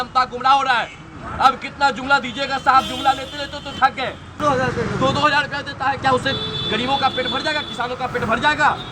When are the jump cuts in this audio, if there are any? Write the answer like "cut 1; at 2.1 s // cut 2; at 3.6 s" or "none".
cut 1; at 4.4 s